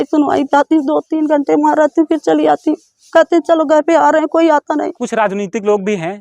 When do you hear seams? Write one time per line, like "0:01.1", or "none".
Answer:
0:05.0